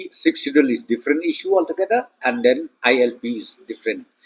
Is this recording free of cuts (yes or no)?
yes